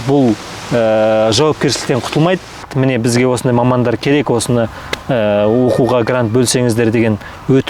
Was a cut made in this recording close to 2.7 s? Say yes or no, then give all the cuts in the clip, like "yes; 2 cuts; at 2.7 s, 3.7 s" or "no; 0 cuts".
yes; 1 cut; at 2.7 s